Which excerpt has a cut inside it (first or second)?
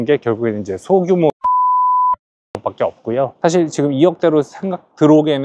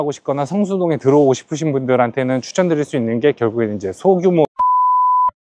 first